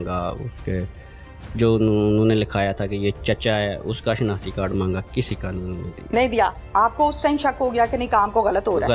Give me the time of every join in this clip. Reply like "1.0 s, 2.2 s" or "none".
6.6 s